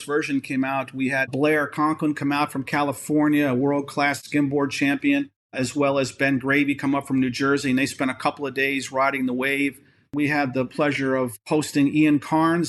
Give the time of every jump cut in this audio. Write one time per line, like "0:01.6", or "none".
0:01.3
0:04.2
0:10.1